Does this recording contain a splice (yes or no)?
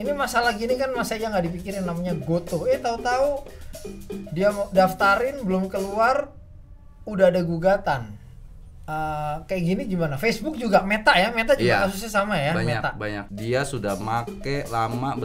yes